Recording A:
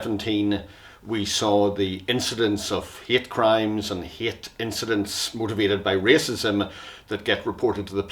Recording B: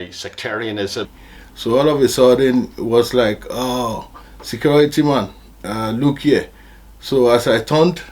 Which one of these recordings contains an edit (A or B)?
B